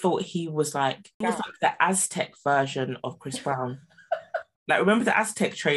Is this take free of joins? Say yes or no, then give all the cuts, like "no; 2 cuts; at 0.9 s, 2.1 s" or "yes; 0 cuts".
no; 1 cut; at 1.2 s